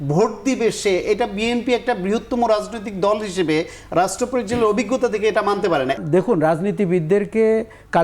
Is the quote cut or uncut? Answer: cut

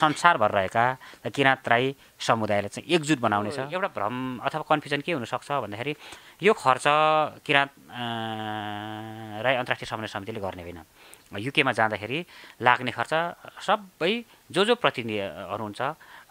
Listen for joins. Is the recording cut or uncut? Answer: cut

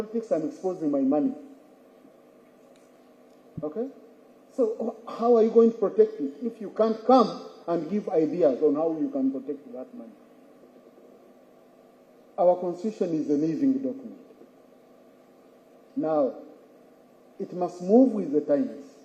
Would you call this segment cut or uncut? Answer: cut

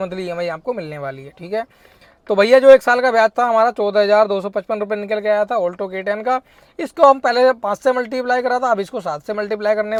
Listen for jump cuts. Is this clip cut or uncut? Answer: uncut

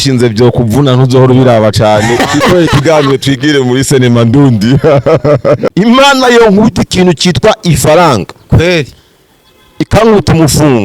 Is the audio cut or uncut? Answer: cut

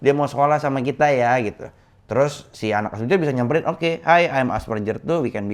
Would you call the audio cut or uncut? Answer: uncut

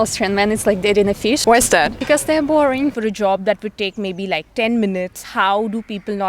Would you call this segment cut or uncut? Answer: cut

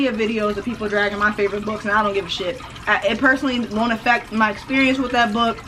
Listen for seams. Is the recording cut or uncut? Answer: uncut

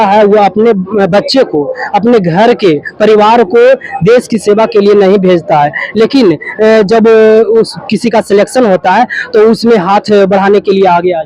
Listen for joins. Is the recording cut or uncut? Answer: uncut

